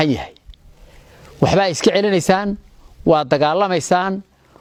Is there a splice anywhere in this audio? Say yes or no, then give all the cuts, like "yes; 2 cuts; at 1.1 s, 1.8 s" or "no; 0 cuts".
no; 0 cuts